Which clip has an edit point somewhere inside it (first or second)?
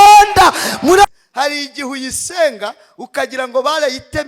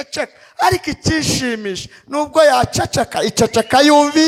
first